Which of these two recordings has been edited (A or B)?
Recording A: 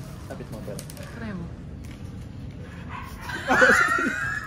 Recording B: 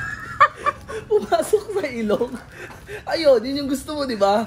A